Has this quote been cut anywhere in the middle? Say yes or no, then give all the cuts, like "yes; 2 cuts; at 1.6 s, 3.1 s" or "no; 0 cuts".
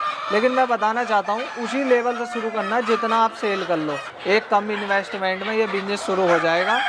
yes; 1 cut; at 4.1 s